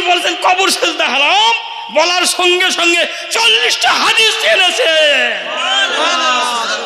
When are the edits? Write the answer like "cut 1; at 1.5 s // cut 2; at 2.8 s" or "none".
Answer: none